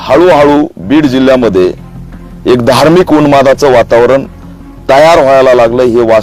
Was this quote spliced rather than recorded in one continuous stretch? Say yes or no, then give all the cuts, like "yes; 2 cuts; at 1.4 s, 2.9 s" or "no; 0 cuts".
no; 0 cuts